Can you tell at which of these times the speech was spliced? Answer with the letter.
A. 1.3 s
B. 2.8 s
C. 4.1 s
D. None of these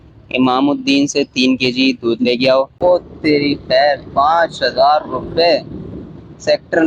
B